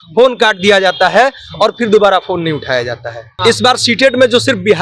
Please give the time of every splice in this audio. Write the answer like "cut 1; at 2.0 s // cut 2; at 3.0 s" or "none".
cut 1; at 3.4 s